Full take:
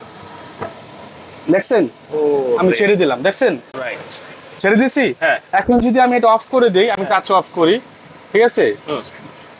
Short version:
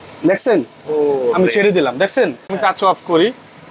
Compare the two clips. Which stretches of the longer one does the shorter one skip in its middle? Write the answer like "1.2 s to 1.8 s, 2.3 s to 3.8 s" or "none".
3.8 s to 7.0 s